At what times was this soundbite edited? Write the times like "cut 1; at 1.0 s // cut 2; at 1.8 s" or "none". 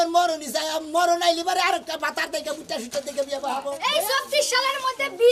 cut 1; at 3.7 s

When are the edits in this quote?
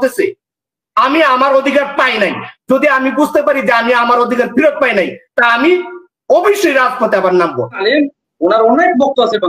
cut 1; at 7.8 s

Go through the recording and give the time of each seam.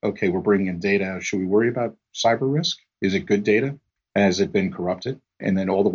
none

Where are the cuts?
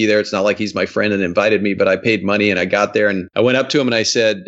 cut 1; at 3.2 s

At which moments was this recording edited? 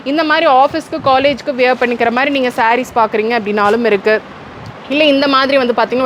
none

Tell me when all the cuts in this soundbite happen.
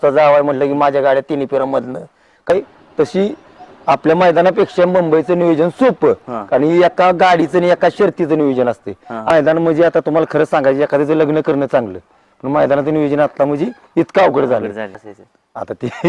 cut 1; at 2.5 s // cut 2; at 9.3 s // cut 3; at 14.9 s

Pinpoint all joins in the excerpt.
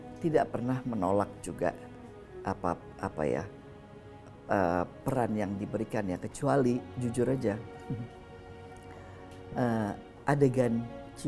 none

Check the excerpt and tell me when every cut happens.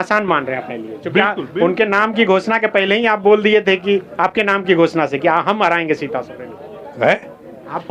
none

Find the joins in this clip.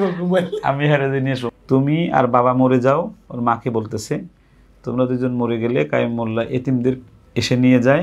cut 1; at 1.4 s

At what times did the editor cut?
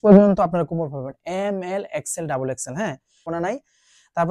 cut 1; at 3.3 s

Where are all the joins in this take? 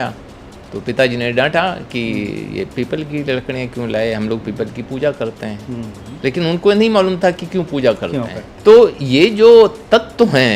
cut 1; at 8.4 s

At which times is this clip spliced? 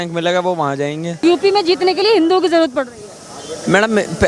cut 1; at 1.2 s

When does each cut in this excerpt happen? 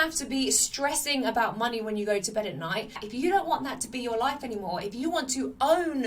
cut 1; at 3.0 s

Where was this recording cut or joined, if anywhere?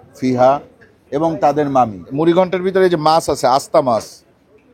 cut 1; at 2.1 s

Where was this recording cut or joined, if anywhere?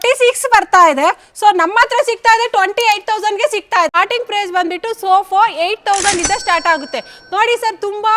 cut 1; at 3.9 s

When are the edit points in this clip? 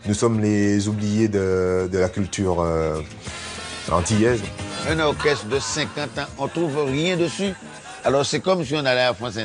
cut 1; at 4.7 s

